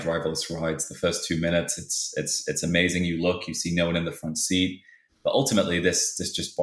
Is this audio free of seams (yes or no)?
no